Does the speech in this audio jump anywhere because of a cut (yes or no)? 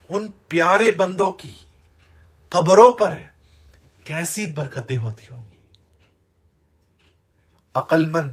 no